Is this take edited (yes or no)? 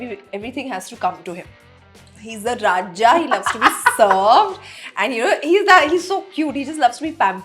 no